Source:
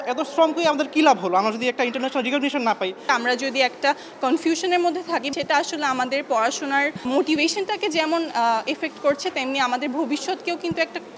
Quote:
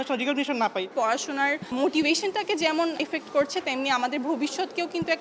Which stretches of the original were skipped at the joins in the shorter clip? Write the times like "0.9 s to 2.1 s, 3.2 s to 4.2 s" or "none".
3.0 s to 6.2 s, 8.3 s to 8.7 s